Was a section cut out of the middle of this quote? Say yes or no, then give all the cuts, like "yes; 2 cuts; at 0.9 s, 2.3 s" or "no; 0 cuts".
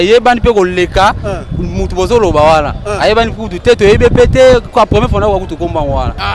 no; 0 cuts